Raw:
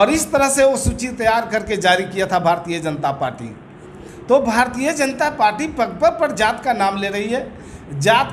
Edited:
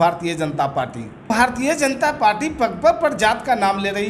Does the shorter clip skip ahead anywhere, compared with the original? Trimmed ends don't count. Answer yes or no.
yes